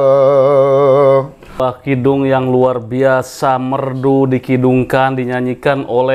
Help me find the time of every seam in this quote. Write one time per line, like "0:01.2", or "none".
0:01.6